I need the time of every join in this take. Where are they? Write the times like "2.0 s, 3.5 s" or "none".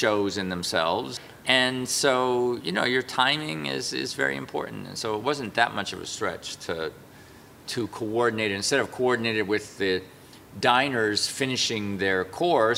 1.3 s